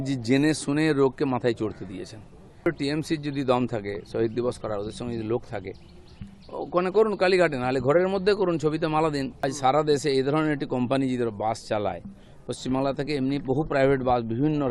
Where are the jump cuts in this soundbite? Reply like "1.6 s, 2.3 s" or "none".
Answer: 2.7 s, 9.4 s